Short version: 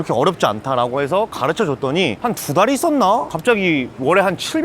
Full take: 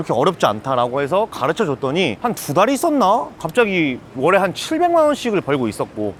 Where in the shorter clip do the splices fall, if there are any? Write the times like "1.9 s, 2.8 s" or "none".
3.5 s